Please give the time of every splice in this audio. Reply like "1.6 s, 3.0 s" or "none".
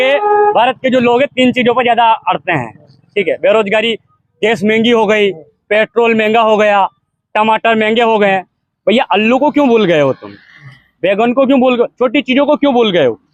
none